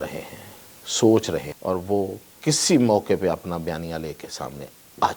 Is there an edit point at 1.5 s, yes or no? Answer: yes